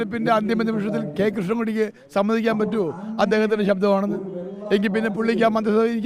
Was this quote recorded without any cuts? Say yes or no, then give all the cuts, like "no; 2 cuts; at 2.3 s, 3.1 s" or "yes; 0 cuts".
yes; 0 cuts